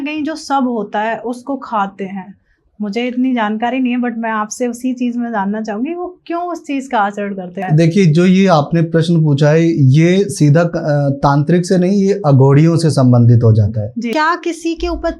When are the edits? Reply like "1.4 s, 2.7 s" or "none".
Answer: 7.6 s, 14.1 s